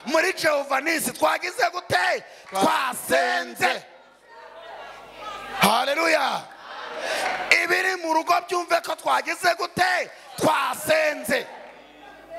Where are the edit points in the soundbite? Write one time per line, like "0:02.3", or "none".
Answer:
none